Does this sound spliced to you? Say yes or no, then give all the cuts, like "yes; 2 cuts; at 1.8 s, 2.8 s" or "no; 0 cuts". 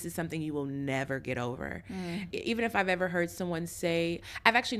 yes; 1 cut; at 2.3 s